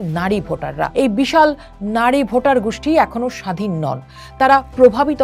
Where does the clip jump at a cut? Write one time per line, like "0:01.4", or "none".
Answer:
0:00.9